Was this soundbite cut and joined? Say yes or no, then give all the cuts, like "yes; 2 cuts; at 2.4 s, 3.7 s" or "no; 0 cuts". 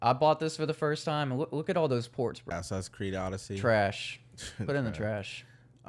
yes; 1 cut; at 2.5 s